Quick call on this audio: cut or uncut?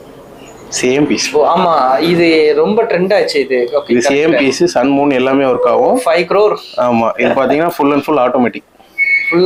uncut